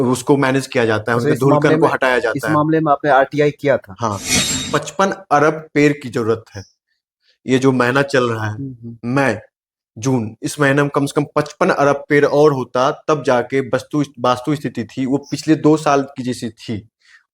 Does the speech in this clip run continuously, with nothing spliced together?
no; 1 cut; at 4.6 s

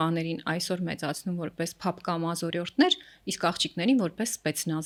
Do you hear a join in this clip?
no; 0 cuts

